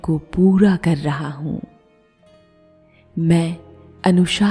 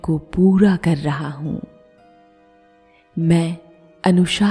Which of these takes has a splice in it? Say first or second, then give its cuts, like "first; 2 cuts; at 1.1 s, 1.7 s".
second; 2 cuts; at 1.7 s, 3.1 s